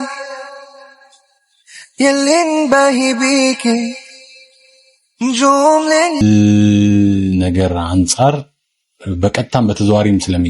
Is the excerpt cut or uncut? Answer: cut